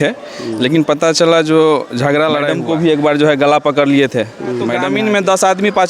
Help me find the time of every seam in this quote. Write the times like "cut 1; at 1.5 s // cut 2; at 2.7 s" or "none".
cut 1; at 2.6 s // cut 2; at 4.8 s